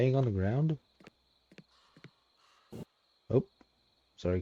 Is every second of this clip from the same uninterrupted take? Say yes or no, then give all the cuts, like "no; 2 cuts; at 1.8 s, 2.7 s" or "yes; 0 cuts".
yes; 0 cuts